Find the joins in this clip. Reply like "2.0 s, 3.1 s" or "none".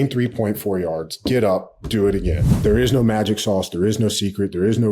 2.5 s